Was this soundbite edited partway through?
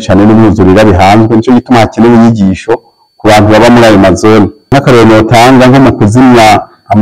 yes; 1 cut; at 4.7 s

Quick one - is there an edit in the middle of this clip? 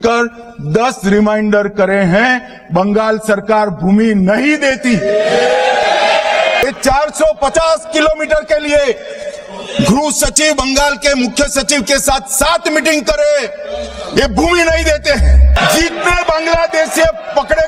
no; 0 cuts

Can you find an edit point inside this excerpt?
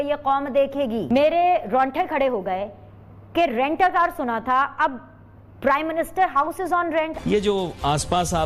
yes; 2 cuts; at 1.0 s, 7.1 s

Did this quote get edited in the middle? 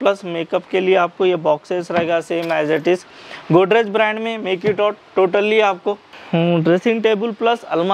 no; 0 cuts

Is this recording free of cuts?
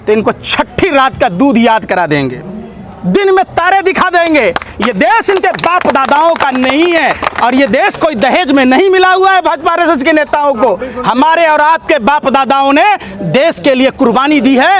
yes; 0 cuts

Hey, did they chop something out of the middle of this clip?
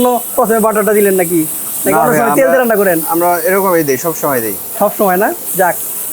no; 0 cuts

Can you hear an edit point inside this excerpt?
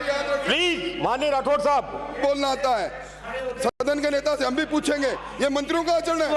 no; 0 cuts

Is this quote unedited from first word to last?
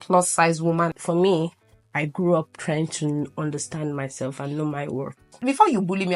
no; 2 cuts; at 1.0 s, 5.3 s

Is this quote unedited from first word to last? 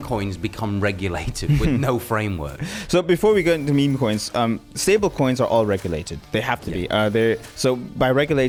yes; 0 cuts

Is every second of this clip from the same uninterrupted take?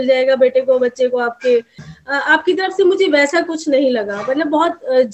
no; 1 cut; at 1.8 s

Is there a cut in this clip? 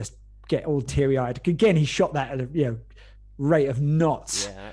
no; 0 cuts

